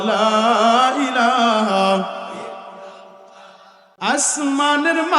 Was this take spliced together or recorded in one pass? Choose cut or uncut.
cut